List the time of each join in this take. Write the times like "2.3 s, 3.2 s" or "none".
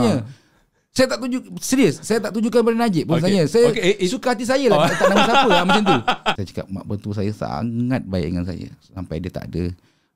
6.4 s